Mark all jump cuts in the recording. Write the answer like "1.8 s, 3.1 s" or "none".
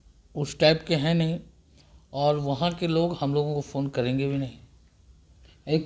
none